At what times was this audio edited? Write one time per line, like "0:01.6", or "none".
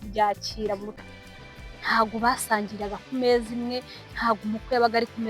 0:00.9